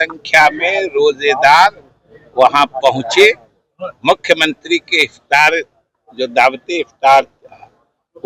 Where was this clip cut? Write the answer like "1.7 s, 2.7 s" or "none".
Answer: none